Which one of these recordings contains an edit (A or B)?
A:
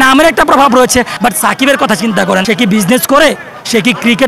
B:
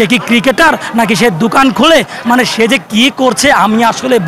A